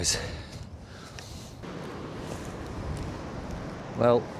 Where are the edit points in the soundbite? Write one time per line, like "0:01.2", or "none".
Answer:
0:01.3

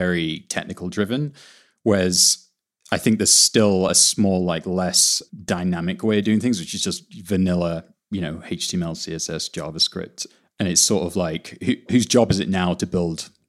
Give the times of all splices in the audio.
0:10.2
0:11.9

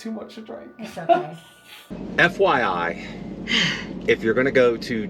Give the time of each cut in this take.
0:01.9

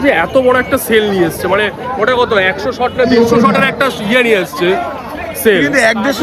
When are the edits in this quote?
none

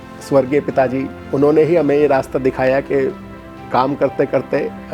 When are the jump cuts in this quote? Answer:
0:01.2

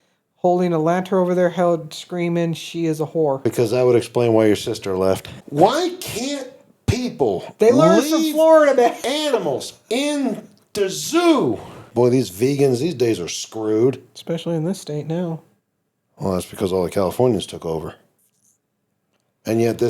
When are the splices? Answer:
0:03.4
0:05.4
0:11.9

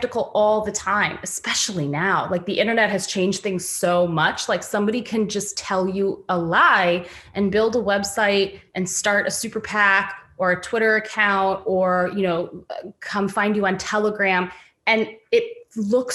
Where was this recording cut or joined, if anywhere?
none

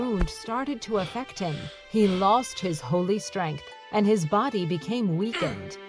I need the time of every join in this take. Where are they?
none

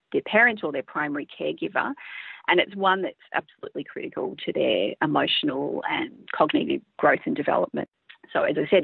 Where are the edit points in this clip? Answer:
0:07.9

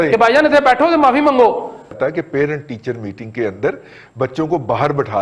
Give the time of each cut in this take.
0:02.0

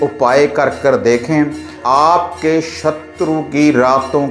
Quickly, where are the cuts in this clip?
0:01.8

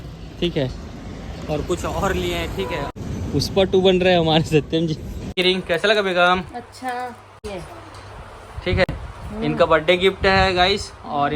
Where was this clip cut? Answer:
0:03.0
0:05.3
0:07.3

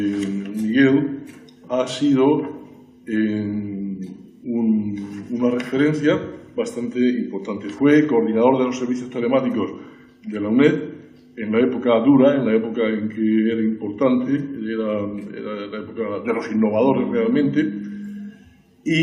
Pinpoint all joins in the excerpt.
none

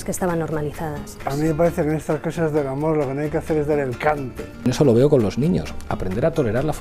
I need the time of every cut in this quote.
0:01.2
0:04.6

